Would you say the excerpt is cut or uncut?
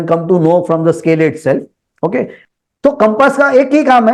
cut